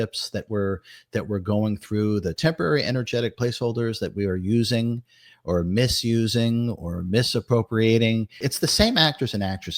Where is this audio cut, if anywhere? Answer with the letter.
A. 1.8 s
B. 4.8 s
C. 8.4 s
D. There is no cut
C